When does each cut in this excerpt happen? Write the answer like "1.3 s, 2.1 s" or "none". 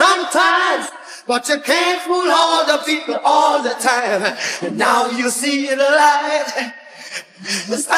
none

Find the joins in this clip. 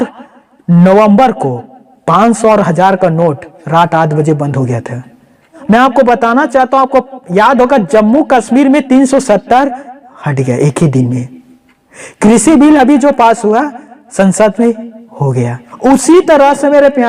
5.6 s, 15.6 s

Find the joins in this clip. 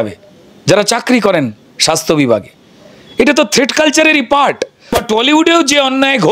5.0 s

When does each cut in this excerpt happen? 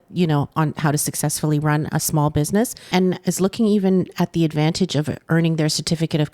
2.9 s

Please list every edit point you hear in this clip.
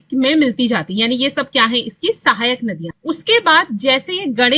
none

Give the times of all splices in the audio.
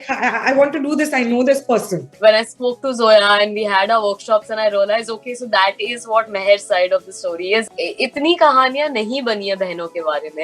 2.0 s, 7.6 s

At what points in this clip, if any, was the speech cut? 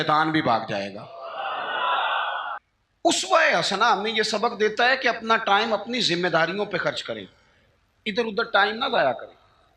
2.6 s

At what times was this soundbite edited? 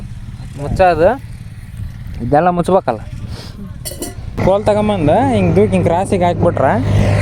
4.3 s

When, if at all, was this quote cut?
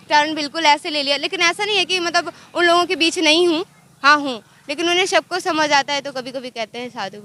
none

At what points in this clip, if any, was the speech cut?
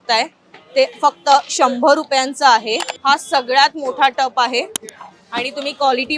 2.9 s

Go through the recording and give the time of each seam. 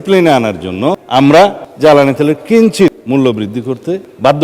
1.0 s, 3.0 s

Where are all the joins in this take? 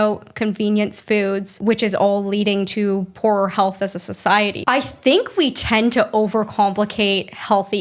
1.5 s, 4.6 s

